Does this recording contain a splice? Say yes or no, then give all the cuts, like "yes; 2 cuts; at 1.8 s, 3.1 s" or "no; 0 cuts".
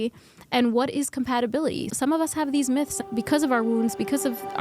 yes; 2 cuts; at 1.9 s, 2.9 s